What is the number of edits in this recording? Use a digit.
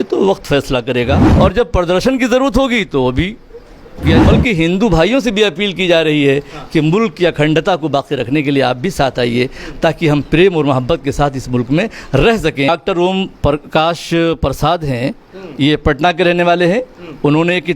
3